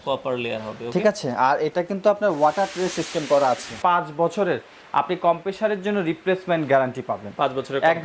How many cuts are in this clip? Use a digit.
1